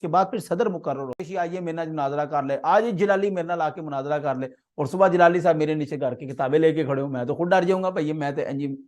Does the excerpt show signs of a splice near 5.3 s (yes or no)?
no